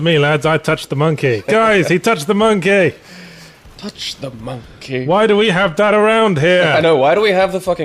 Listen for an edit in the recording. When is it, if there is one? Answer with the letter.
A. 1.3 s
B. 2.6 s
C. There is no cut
B